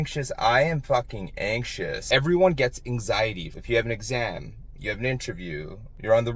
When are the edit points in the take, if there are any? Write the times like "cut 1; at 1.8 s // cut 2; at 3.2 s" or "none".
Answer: cut 1; at 2.0 s // cut 2; at 3.5 s